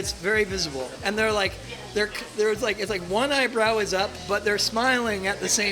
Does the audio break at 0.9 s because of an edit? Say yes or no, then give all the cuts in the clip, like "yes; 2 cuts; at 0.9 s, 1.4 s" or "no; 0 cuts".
yes; 1 cut; at 0.9 s